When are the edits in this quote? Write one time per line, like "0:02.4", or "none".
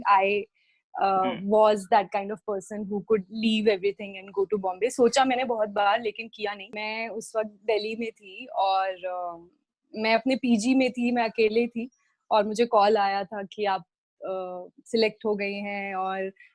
0:06.8